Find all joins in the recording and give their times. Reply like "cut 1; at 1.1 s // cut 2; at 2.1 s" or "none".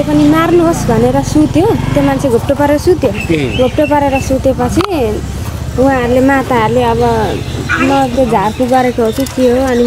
none